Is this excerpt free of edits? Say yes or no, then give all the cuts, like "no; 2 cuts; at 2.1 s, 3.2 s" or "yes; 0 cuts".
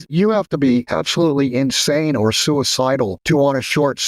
no; 2 cuts; at 0.9 s, 3.2 s